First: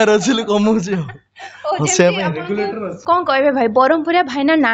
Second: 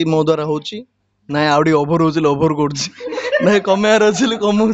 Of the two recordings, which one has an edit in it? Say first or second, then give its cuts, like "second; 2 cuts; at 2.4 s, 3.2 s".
first; 1 cut; at 2.9 s